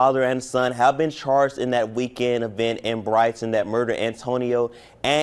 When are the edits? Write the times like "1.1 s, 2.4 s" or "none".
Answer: none